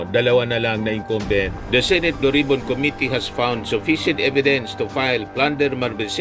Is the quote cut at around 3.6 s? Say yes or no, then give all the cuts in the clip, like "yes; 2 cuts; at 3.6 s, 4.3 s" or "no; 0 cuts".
no; 1 cut; at 1.6 s